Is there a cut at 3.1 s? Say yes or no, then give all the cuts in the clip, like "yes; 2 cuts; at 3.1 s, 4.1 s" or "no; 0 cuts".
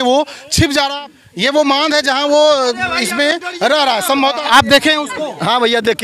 no; 2 cuts; at 0.9 s, 4.4 s